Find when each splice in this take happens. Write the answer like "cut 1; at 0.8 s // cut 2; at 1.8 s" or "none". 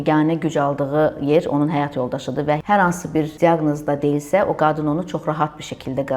cut 1; at 2.6 s // cut 2; at 3.3 s